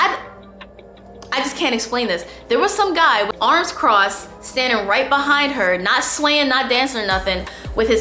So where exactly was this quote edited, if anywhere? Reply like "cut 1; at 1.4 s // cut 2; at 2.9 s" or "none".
cut 1; at 3.3 s